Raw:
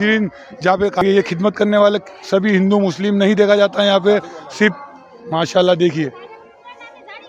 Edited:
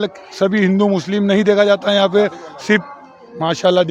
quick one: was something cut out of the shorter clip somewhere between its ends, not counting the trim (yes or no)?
no